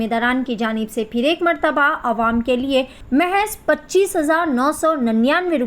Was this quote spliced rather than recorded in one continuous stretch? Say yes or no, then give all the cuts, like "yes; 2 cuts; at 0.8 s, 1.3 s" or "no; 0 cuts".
yes; 1 cut; at 3.0 s